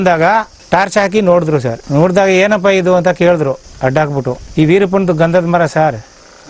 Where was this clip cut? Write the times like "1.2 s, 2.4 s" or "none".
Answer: 4.3 s

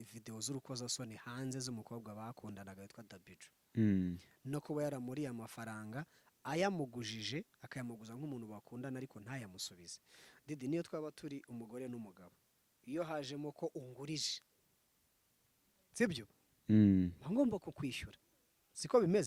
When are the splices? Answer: none

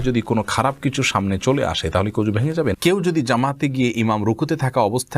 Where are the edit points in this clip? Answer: 2.8 s

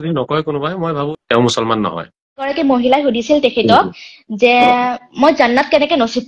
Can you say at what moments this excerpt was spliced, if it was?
1.1 s, 2.5 s

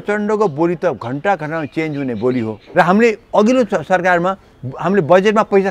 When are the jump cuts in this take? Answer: 2.6 s

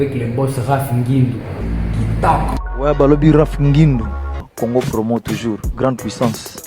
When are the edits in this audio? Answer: 1.6 s, 2.6 s

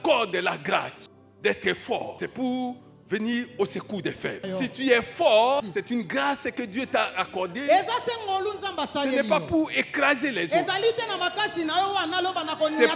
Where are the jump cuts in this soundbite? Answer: 1.0 s, 2.1 s, 4.4 s, 5.6 s

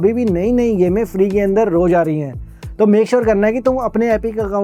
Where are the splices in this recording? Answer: none

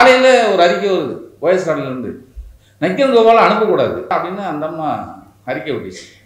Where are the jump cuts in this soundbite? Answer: 4.1 s

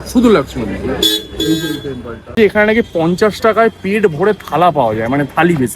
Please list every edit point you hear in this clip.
2.3 s

